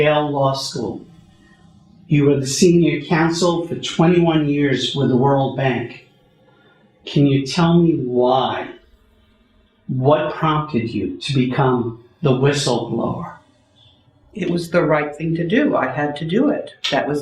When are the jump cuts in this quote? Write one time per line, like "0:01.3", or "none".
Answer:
0:12.7